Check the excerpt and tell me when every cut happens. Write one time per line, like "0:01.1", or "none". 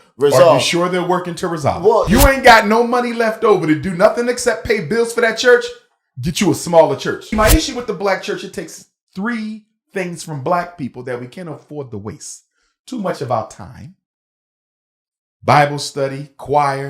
0:02.1
0:07.3